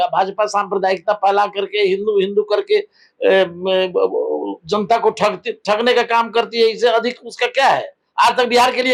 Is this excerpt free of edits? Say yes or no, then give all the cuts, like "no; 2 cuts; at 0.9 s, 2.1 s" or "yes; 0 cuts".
yes; 0 cuts